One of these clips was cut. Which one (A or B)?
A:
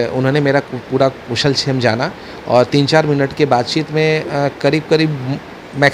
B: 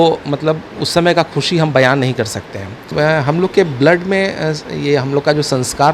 B